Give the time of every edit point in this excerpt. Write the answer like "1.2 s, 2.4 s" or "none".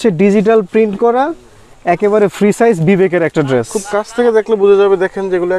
none